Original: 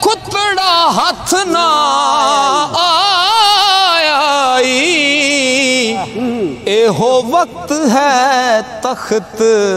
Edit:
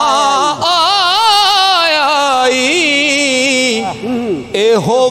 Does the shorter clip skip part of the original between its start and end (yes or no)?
no